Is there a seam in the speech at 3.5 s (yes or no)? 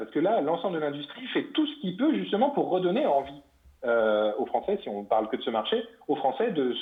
no